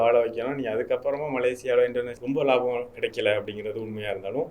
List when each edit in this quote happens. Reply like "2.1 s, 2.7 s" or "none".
2.1 s